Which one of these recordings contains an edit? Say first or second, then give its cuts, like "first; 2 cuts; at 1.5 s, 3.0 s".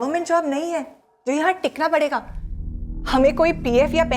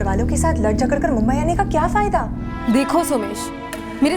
second; 1 cut; at 2.5 s